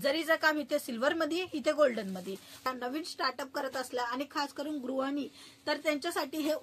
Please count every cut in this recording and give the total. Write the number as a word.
one